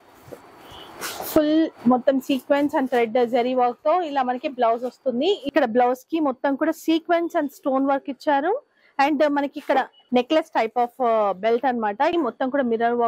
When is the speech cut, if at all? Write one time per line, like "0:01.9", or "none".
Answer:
0:05.4
0:12.1